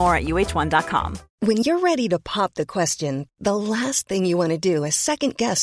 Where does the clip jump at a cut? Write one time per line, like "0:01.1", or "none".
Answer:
0:01.2